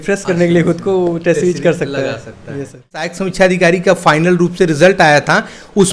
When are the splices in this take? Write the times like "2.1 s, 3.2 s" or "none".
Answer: 3.2 s